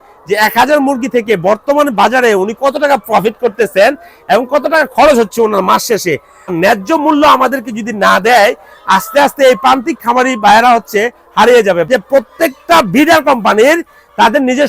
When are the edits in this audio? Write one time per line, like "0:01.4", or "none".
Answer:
0:06.5
0:11.9